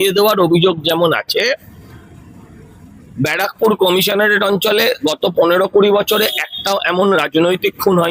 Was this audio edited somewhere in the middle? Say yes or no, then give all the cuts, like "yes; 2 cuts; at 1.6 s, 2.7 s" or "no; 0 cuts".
no; 0 cuts